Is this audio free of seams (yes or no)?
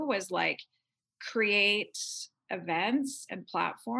yes